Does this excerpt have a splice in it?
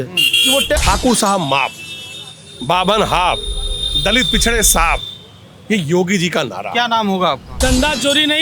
yes; 2 cuts; at 0.8 s, 7.5 s

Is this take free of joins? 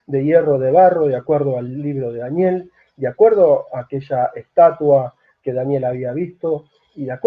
no; 1 cut; at 2.2 s

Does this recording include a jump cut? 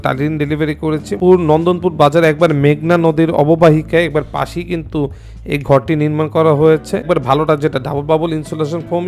yes; 2 cuts; at 1.1 s, 7.1 s

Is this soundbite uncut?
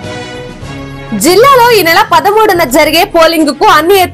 no; 1 cut; at 1.0 s

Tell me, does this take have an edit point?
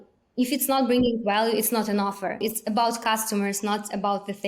yes; 1 cut; at 2.4 s

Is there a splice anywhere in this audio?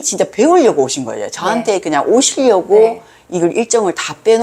no; 0 cuts

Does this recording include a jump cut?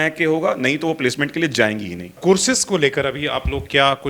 yes; 1 cut; at 2.1 s

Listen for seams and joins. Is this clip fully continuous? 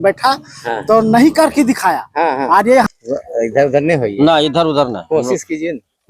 no; 1 cut; at 2.9 s

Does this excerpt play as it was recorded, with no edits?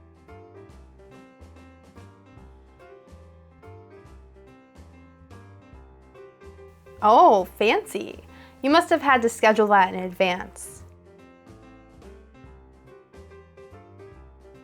yes; 0 cuts

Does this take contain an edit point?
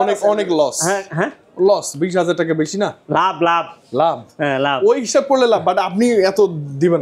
no; 0 cuts

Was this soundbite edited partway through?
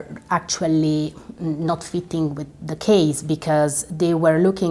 no; 0 cuts

